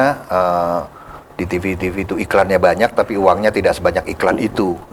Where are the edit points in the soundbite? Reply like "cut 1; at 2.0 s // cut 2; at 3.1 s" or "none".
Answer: none